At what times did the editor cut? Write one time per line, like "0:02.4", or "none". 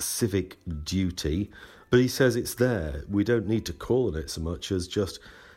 none